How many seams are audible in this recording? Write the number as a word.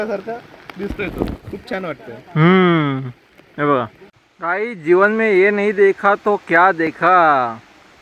one